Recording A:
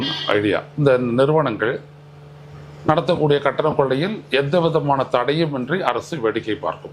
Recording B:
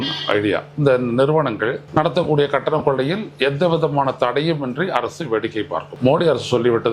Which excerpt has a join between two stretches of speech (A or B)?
B